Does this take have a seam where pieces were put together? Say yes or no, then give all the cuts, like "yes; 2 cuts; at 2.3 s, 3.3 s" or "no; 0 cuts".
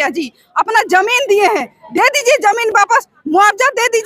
no; 0 cuts